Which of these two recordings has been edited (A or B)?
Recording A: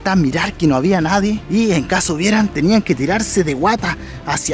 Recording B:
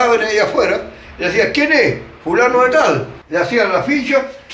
B